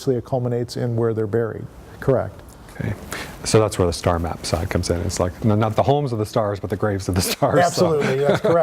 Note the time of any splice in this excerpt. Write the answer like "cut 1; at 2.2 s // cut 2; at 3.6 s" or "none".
none